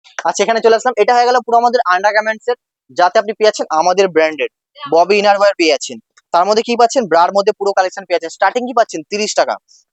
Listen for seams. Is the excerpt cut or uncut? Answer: uncut